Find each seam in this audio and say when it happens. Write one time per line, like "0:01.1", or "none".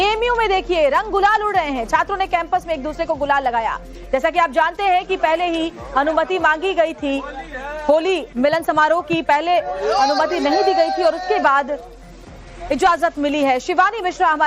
0:04.7